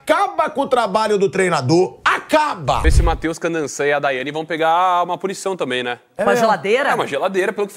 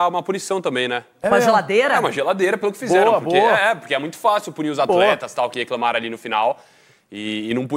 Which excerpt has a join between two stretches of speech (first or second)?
first